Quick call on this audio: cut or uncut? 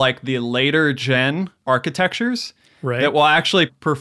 cut